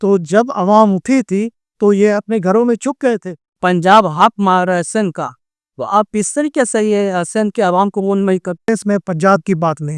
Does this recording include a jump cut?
yes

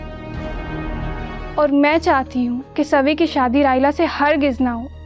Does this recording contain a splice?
yes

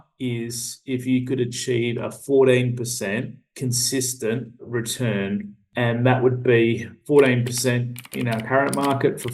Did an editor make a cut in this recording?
yes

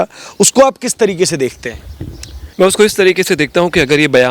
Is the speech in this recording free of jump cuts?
yes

